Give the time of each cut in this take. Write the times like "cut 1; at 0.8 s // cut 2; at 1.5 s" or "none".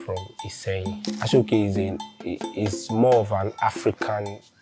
cut 1; at 1.1 s